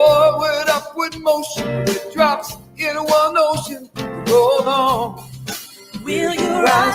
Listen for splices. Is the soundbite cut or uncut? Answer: cut